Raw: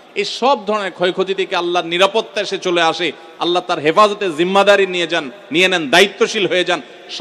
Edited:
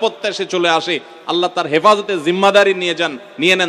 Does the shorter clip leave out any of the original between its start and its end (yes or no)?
no